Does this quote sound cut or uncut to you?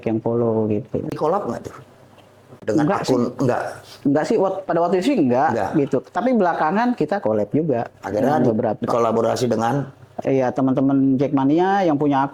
uncut